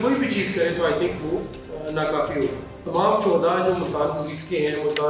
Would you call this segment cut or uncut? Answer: cut